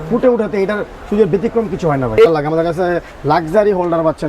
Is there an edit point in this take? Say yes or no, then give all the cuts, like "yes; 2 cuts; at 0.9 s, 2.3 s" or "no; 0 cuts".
yes; 1 cut; at 2.3 s